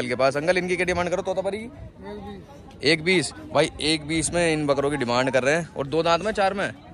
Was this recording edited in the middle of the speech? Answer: no; 0 cuts

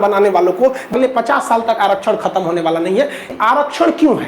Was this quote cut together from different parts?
yes; 2 cuts; at 0.9 s, 3.3 s

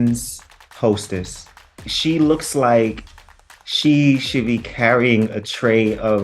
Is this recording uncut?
no; 1 cut; at 1.4 s

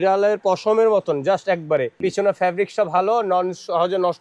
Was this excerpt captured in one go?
no; 1 cut; at 1.9 s

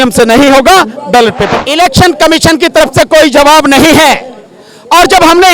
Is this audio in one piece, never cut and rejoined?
no; 1 cut; at 1.5 s

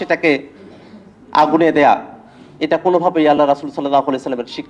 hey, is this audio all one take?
yes; 0 cuts

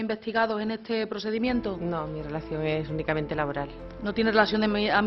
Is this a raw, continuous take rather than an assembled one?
yes; 0 cuts

